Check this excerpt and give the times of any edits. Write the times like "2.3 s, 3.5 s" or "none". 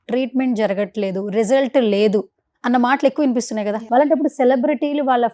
3.8 s